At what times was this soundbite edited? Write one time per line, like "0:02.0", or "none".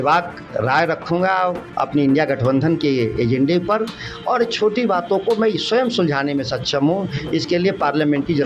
0:01.6